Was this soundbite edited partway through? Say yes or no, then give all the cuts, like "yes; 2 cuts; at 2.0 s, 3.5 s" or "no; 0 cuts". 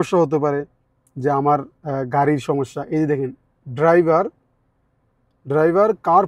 no; 0 cuts